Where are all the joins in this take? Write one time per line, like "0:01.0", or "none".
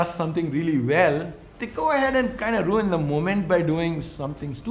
none